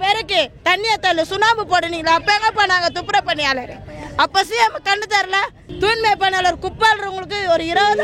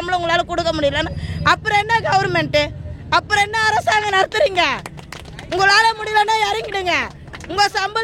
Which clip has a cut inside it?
first; 1 cut; at 5.6 s

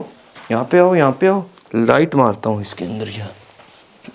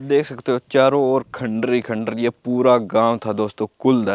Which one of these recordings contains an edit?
first; 1 cut; at 1.6 s

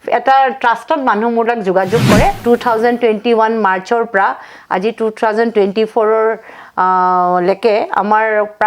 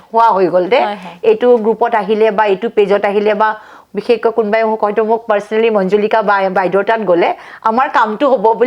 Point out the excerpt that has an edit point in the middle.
first; 1 cut; at 2.4 s

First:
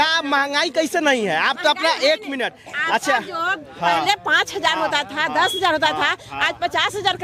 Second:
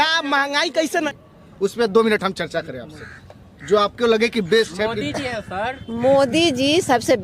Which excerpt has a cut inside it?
second; 1 cut; at 1.1 s

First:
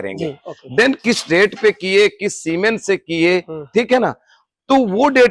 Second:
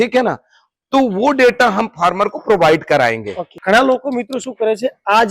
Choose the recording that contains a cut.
second; 1 cut; at 3.5 s

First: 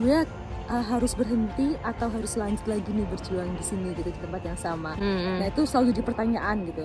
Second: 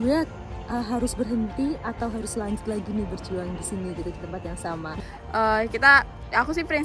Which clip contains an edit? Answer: second; 1 cut; at 4.9 s

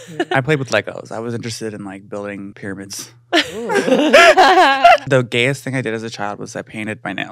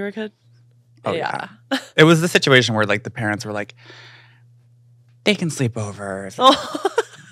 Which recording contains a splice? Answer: first; 2 cuts; at 2.5 s, 5.0 s

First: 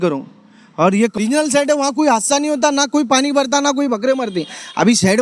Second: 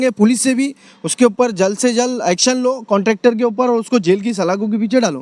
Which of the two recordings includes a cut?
first; 1 cut; at 1.2 s

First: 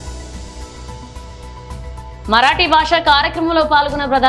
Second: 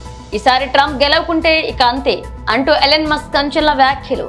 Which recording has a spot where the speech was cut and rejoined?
first; 1 cut; at 1.1 s

